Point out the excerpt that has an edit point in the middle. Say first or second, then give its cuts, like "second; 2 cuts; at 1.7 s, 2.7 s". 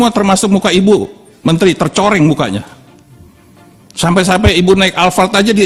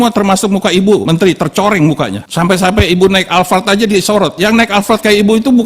second; 2 cuts; at 1.0 s, 2.2 s